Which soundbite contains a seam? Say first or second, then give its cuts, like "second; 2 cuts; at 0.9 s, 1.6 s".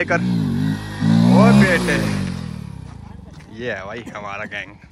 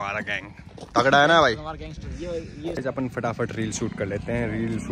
second; 1 cut; at 2.8 s